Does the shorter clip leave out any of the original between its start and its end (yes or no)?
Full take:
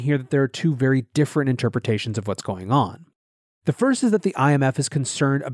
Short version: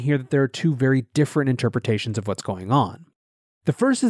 no